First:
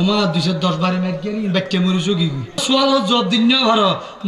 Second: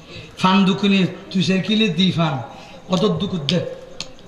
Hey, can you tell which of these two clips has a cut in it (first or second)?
first